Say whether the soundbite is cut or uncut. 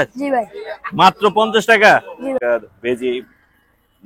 cut